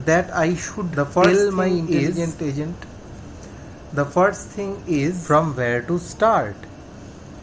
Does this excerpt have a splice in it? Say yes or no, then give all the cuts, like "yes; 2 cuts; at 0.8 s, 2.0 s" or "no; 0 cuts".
yes; 1 cut; at 5.2 s